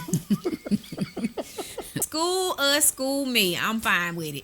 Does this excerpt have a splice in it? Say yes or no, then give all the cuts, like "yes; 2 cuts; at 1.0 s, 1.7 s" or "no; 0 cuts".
yes; 1 cut; at 2.0 s